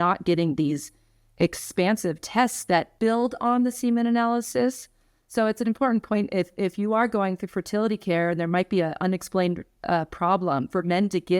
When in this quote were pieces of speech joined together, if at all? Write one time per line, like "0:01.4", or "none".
0:02.9

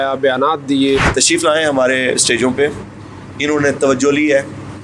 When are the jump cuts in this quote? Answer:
0:01.1

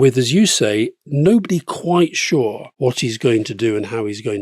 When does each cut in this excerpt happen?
0:02.7

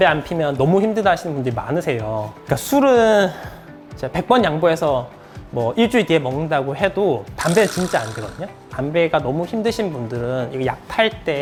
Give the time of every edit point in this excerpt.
none

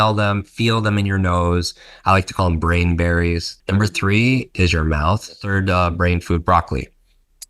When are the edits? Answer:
0:03.7
0:05.4

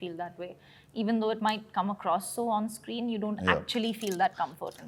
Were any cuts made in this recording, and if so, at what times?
none

